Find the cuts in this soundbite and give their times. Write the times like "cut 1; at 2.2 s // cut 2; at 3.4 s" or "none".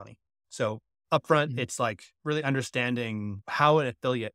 cut 1; at 2.1 s // cut 2; at 3.4 s